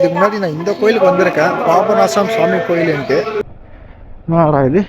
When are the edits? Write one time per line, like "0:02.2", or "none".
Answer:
0:03.4